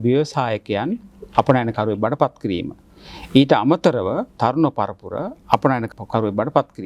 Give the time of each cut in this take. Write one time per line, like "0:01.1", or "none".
0:04.4
0:06.0